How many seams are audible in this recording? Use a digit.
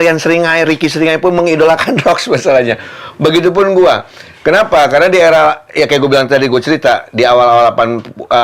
0